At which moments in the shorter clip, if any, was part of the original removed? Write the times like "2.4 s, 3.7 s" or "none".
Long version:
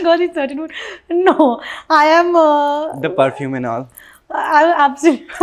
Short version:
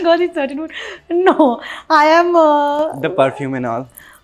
none